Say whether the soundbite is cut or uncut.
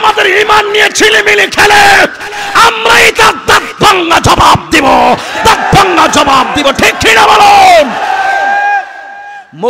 uncut